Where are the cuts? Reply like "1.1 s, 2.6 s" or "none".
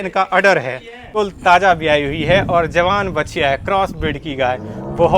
1.1 s